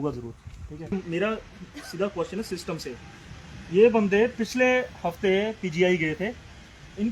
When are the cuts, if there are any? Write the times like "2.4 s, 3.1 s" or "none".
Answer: 0.9 s